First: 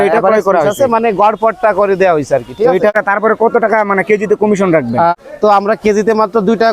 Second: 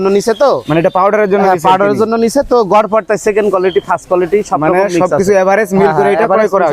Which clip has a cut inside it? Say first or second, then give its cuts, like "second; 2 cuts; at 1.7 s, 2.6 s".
first; 2 cuts; at 3.0 s, 5.1 s